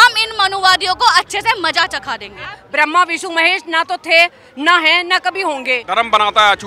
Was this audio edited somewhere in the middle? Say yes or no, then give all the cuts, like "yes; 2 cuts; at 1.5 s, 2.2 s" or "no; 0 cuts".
yes; 2 cuts; at 2.6 s, 5.8 s